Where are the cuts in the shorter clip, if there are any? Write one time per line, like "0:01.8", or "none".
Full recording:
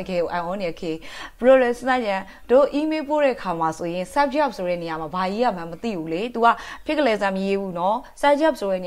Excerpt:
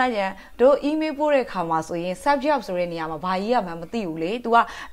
none